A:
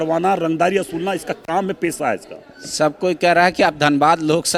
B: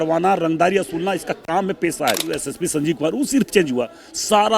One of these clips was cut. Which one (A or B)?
B